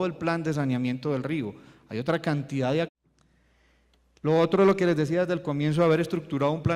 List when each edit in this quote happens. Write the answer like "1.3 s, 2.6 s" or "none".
none